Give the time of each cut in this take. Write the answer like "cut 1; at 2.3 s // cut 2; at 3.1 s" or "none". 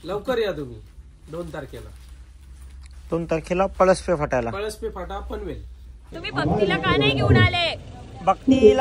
cut 1; at 6.2 s